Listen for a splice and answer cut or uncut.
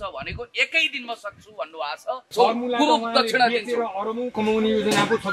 cut